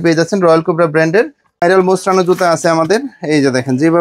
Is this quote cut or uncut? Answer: cut